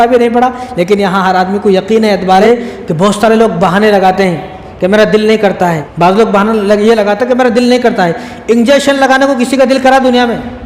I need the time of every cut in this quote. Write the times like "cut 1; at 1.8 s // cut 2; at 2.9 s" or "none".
cut 1; at 2.4 s // cut 2; at 5.8 s

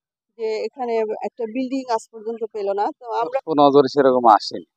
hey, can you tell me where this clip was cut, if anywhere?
cut 1; at 3.3 s

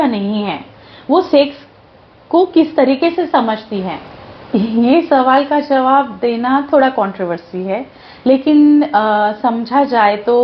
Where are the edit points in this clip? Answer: cut 1; at 4.0 s

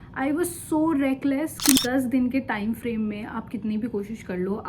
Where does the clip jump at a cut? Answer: cut 1; at 1.8 s

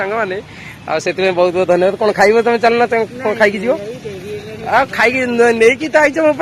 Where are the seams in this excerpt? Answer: none

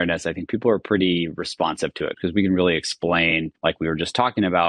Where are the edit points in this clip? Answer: cut 1; at 2.1 s // cut 2; at 3.5 s

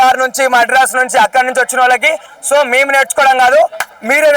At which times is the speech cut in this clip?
cut 1; at 2.3 s

